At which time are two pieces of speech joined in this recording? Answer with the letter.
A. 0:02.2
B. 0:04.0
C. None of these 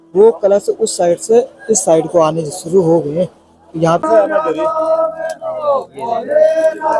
B